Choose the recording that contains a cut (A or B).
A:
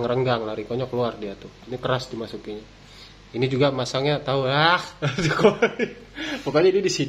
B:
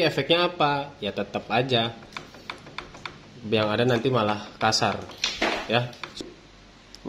B